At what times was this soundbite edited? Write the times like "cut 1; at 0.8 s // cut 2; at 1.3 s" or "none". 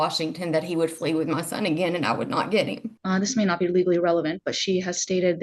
cut 1; at 2.9 s